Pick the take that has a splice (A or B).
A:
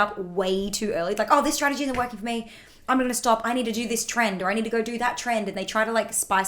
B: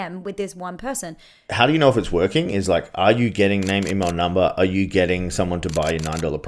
B